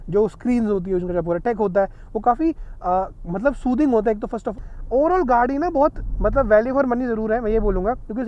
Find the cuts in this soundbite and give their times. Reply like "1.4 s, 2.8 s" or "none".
4.5 s